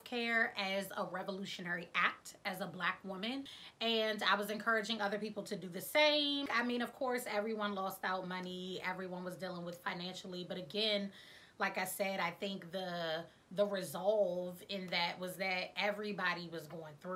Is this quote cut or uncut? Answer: uncut